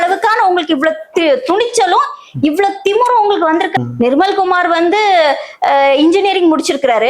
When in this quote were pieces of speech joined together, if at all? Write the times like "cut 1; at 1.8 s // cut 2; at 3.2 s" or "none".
cut 1; at 3.7 s